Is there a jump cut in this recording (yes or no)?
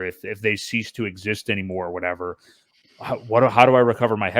no